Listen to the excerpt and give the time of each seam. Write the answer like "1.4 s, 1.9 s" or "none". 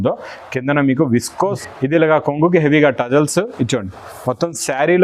1.6 s